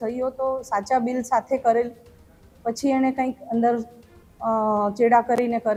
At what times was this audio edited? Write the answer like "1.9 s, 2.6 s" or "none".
none